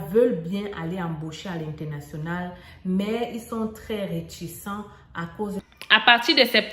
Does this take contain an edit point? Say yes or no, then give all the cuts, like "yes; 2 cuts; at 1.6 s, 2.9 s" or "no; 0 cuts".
yes; 1 cut; at 5.6 s